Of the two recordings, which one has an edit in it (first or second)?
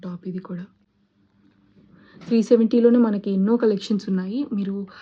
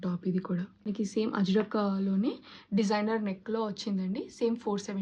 second